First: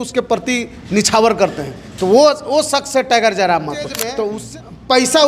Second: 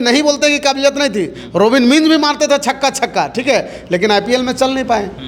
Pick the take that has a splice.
first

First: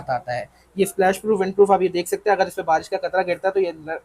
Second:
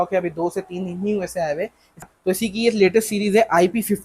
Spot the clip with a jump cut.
second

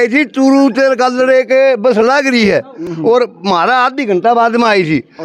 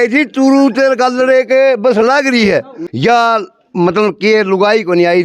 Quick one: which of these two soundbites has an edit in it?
second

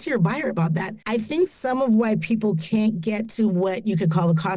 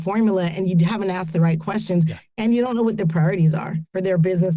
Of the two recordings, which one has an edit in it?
first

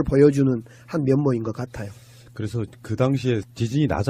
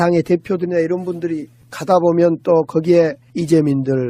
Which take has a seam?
first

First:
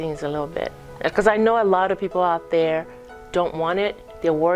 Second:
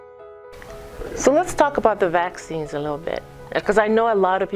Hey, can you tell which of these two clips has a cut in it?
second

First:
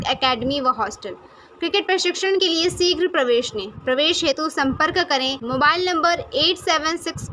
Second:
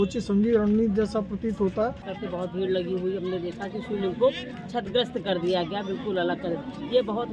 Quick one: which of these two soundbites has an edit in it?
second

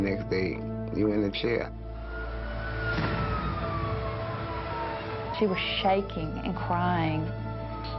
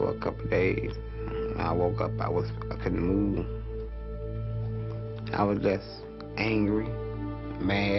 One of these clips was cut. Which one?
first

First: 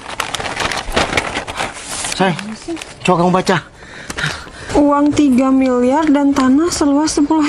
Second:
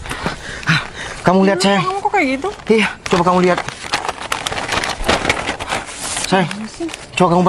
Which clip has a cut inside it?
second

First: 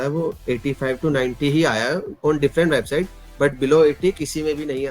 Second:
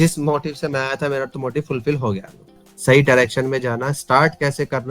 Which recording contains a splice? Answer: second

